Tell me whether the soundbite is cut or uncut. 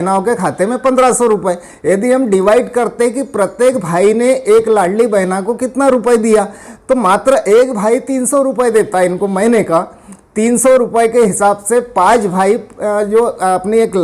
uncut